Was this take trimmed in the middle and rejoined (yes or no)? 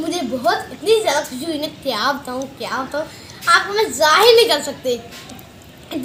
no